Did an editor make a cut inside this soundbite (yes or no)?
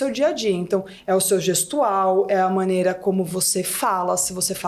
no